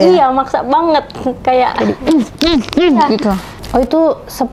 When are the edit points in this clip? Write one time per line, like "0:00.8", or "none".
0:03.5

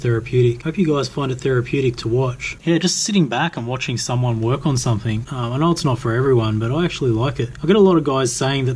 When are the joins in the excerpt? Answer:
0:02.5

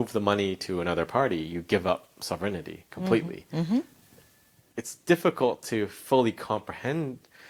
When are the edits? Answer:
none

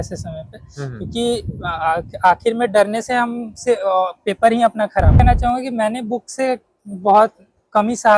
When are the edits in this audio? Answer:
0:05.2

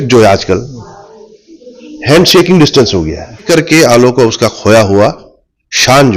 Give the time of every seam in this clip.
0:03.5

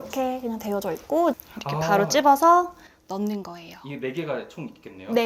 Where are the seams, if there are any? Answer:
0:01.3

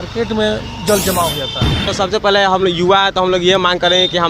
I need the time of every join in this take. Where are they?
0:01.9

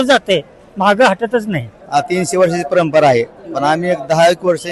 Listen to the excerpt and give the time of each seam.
0:01.7

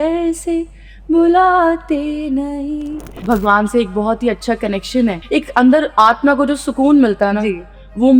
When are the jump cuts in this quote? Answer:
0:03.2
0:05.2

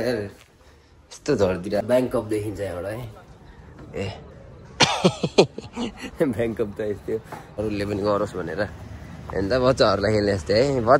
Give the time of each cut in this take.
0:01.8
0:07.4

